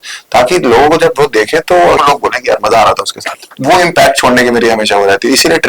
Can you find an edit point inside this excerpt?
yes; 2 cuts; at 2.0 s, 3.5 s

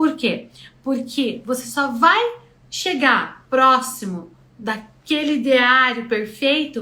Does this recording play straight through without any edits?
yes; 0 cuts

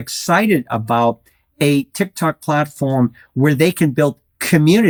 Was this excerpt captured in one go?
yes; 0 cuts

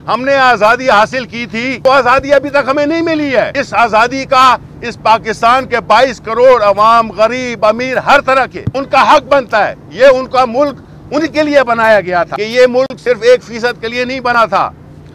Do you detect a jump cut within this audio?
yes; 4 cuts; at 1.8 s, 3.5 s, 8.6 s, 12.4 s

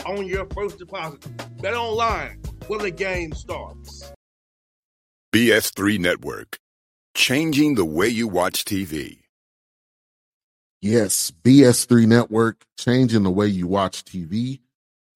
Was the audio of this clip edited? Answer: yes; 1 cut; at 4.0 s

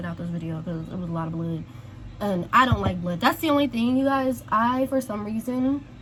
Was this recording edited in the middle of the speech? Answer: no; 0 cuts

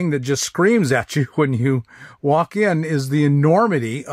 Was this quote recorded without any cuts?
yes; 0 cuts

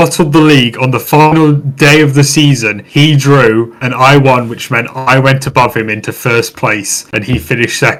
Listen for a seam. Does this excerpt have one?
no; 0 cuts

